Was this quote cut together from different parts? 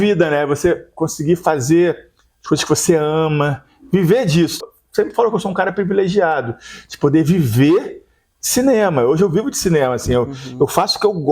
yes; 1 cut; at 4.6 s

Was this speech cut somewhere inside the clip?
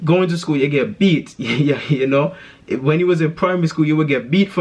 no; 0 cuts

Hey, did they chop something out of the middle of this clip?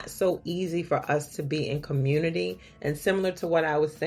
no; 0 cuts

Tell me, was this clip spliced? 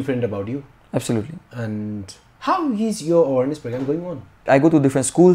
yes; 1 cut; at 4.4 s

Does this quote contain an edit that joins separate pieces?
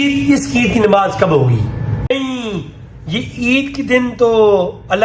yes; 1 cut; at 2.1 s

